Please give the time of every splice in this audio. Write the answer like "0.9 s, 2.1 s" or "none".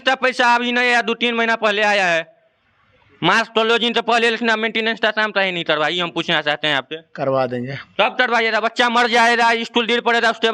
none